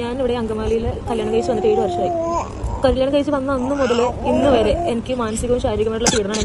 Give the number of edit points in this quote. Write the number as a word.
zero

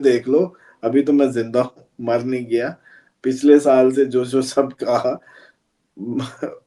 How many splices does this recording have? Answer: zero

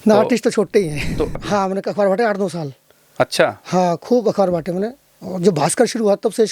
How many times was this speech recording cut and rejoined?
one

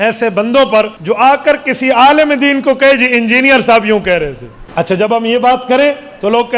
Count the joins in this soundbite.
two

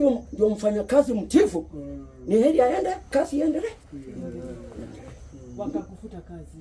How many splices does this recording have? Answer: zero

